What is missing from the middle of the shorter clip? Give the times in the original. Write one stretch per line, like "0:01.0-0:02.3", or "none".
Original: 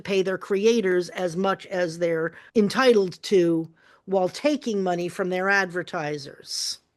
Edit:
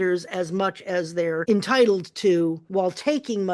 0:02.3-0:02.5
0:03.7-0:04.0